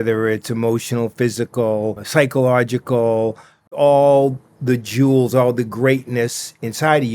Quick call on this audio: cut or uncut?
cut